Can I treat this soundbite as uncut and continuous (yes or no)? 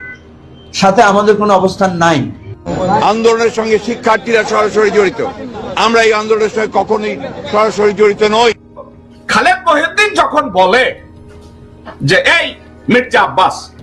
yes